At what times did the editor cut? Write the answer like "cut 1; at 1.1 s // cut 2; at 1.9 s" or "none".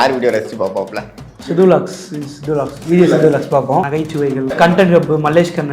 cut 1; at 4.4 s